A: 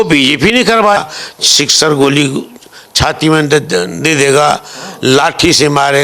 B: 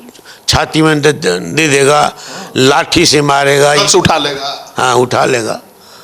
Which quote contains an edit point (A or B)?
A